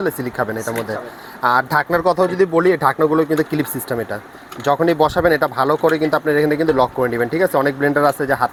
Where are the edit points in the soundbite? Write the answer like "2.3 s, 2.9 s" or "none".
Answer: none

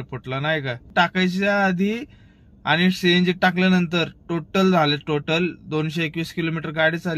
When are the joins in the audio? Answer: 0.9 s

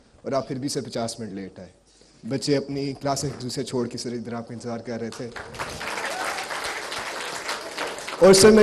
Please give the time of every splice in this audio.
none

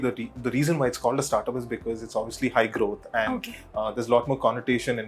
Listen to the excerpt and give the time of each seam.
none

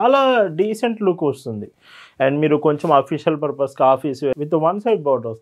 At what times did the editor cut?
4.4 s

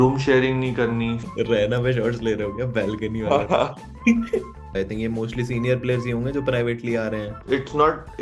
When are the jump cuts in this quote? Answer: 1.2 s, 4.8 s, 7.4 s

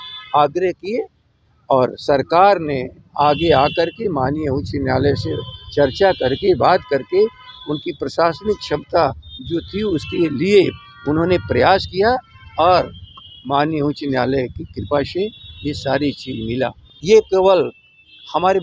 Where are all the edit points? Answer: 16.9 s

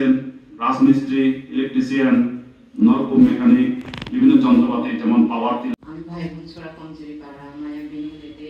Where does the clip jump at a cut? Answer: 5.8 s

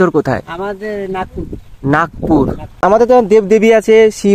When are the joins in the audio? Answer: 2.8 s

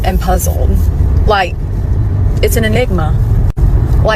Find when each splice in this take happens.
none

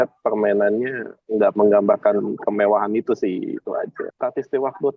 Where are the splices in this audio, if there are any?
4.0 s

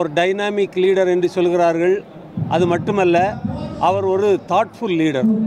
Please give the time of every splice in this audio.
none

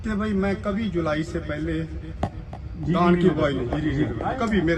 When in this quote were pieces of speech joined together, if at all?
none

